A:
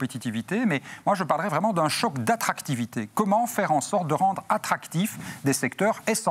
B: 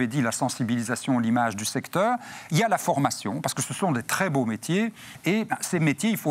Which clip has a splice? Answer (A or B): B